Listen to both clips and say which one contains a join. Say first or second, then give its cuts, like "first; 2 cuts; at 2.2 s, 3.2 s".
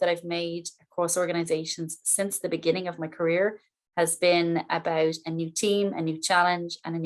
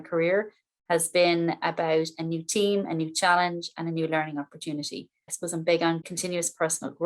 second; 2 cuts; at 5.3 s, 6.1 s